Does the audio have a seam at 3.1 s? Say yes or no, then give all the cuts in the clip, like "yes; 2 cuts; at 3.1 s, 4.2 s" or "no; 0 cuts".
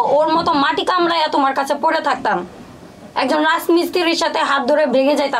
no; 0 cuts